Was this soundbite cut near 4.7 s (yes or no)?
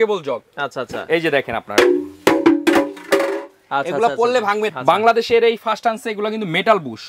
yes